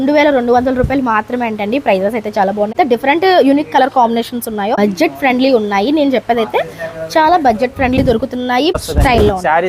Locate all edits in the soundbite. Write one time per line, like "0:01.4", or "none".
0:02.7
0:04.8
0:08.7